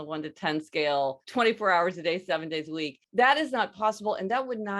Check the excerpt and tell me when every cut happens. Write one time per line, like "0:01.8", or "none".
0:01.2
0:03.0